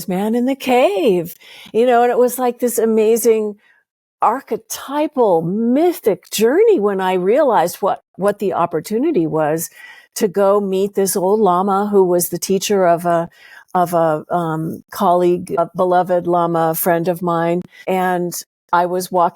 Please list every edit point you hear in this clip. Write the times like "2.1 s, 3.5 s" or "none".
15.6 s, 17.7 s